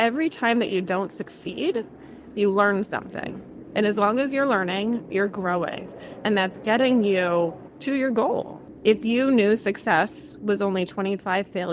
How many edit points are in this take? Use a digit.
2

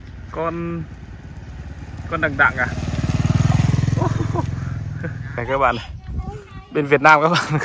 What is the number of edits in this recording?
1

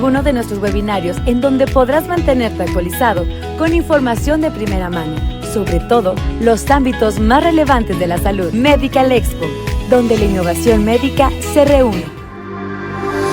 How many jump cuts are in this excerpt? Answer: 1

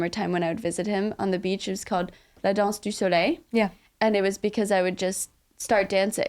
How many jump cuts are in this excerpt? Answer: 2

